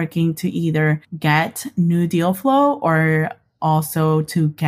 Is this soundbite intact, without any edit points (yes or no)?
no